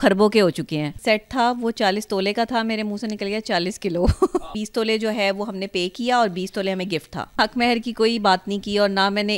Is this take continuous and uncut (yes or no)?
no